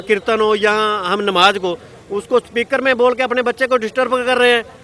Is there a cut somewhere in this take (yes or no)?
no